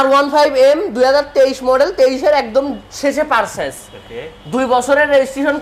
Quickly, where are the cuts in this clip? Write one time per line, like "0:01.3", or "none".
none